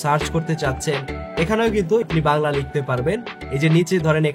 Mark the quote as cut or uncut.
cut